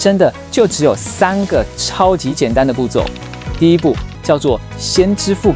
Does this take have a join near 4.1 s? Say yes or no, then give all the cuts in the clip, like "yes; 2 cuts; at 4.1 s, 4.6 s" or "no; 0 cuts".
yes; 1 cut; at 4.1 s